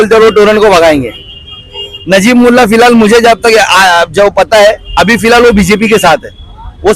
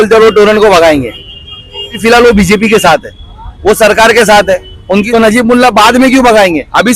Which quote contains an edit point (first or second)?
second